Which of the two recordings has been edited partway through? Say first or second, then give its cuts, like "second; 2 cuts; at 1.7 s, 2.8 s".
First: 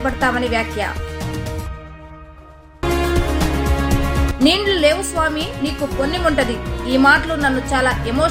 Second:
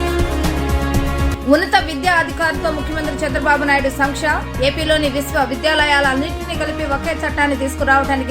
second; 1 cut; at 0.9 s